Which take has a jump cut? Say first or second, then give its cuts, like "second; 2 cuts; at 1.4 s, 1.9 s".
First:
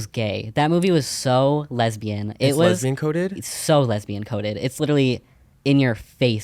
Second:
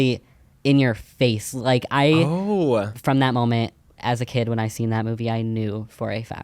second; 1 cut; at 2.9 s